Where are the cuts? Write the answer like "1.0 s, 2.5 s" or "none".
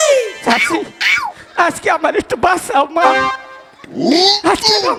none